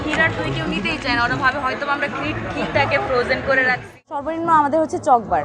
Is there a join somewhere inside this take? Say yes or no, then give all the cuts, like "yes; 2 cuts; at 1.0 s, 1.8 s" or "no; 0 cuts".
yes; 1 cut; at 3.8 s